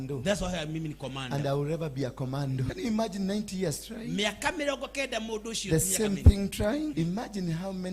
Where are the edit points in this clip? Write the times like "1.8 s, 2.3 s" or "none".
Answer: 2.7 s, 6.9 s